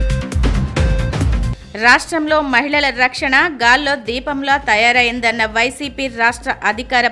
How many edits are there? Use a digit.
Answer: 1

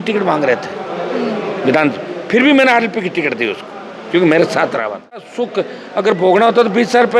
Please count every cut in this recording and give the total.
1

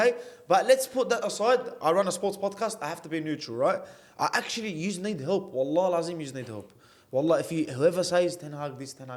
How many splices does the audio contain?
0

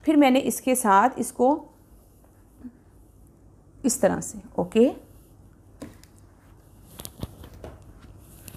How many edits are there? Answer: 0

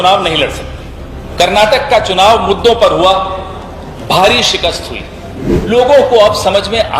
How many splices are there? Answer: 2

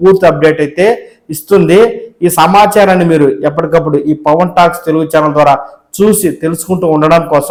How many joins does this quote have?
0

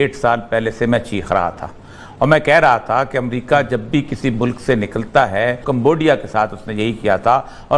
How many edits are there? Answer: 1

